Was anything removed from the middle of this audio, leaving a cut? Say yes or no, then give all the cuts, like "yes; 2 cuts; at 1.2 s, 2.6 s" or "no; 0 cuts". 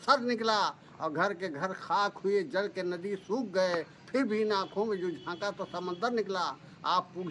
no; 0 cuts